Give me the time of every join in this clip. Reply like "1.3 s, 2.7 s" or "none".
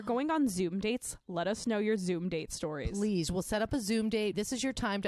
none